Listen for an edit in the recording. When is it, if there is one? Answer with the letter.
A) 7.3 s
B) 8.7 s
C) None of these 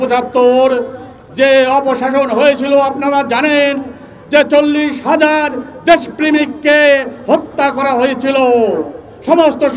C